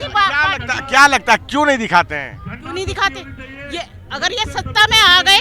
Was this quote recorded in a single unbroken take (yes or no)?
yes